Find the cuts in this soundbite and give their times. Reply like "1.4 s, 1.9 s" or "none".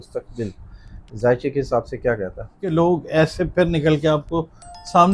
2.6 s